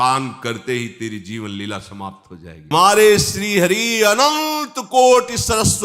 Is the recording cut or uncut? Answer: cut